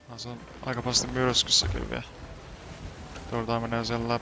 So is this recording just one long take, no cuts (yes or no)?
yes